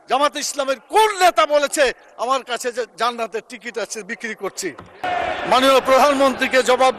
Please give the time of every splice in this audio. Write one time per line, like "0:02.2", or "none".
0:05.0